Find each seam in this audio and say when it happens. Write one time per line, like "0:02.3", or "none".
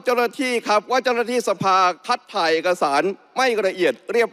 none

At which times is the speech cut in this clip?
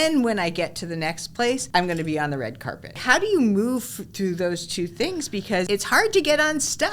0:01.6
0:03.0
0:05.6

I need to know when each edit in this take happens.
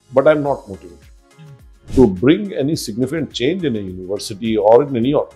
0:01.8

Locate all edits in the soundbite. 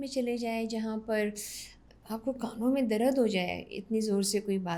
none

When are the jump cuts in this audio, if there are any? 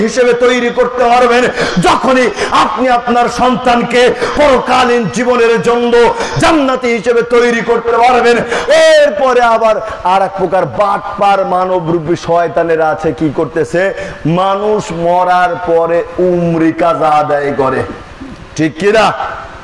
0:08.5

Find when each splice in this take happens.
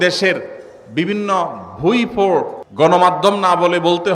0:02.6

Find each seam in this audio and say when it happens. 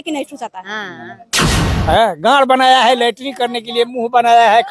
0:01.4

